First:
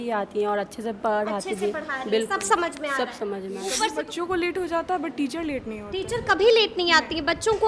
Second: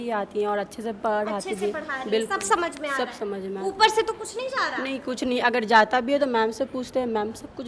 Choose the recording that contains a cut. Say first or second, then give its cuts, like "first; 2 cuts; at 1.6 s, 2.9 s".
first; 1 cut; at 3.8 s